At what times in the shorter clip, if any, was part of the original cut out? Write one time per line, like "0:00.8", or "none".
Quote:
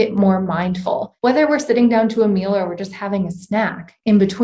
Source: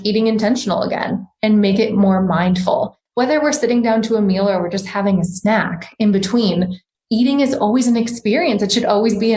0:01.1